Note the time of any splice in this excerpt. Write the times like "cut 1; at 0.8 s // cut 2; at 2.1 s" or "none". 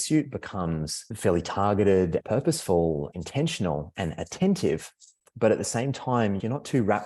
cut 1; at 1.0 s // cut 2; at 2.2 s // cut 3; at 3.1 s